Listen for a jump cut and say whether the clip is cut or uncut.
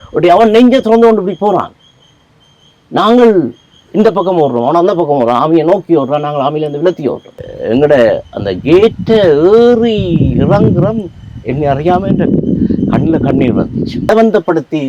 cut